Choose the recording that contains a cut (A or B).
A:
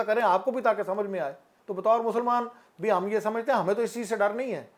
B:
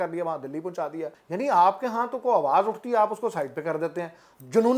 B